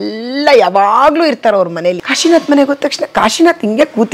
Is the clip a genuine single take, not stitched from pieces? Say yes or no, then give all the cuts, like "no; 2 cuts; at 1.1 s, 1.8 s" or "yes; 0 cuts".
no; 1 cut; at 2.1 s